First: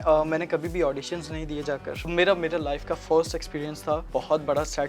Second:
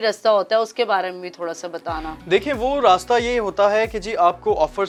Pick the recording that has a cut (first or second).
first